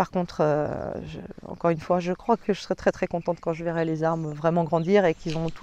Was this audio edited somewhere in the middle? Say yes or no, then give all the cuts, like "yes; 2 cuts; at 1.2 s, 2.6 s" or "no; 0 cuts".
no; 0 cuts